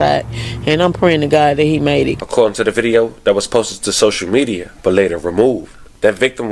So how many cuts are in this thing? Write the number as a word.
one